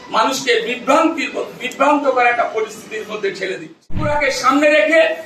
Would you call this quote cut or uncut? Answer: cut